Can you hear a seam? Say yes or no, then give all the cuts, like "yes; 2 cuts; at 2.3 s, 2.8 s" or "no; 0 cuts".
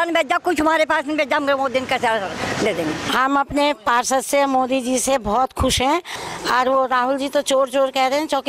yes; 2 cuts; at 3.0 s, 6.2 s